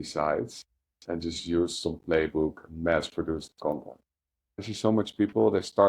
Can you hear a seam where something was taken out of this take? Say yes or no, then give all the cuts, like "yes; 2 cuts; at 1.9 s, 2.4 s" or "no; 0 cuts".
yes; 1 cut; at 4.5 s